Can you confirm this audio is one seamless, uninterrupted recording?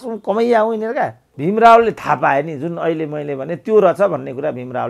no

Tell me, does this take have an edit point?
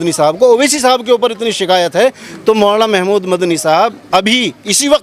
no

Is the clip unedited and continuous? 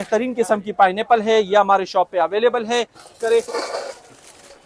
no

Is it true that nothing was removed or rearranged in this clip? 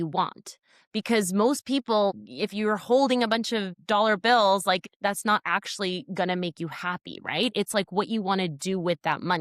no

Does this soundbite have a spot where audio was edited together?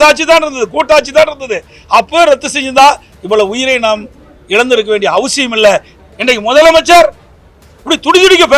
yes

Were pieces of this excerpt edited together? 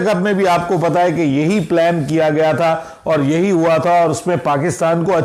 no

